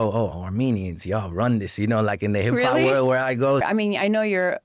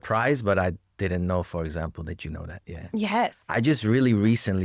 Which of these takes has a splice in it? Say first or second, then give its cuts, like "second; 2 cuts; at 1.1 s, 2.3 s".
first; 1 cut; at 3.7 s